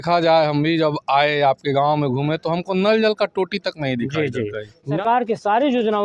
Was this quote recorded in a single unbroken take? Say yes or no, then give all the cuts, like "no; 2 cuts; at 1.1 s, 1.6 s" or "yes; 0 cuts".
no; 1 cut; at 4.9 s